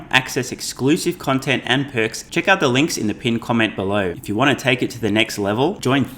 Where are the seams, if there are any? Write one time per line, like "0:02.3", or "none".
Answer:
0:02.2
0:04.2